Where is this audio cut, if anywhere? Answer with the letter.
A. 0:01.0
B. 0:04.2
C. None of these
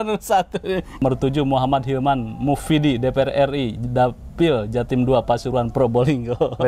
A